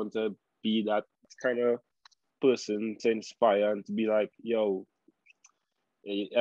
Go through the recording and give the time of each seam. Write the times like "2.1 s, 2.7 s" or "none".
1.3 s